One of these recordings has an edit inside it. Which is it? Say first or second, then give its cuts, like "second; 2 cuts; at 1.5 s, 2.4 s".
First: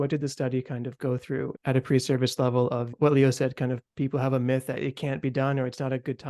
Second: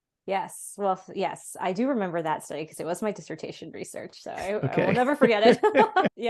first; 2 cuts; at 1.5 s, 2.9 s